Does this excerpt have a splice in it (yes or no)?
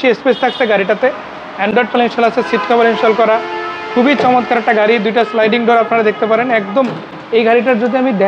no